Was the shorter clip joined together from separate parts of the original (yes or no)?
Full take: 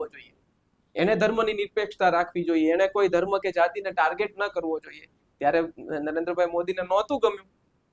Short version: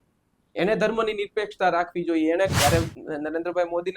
yes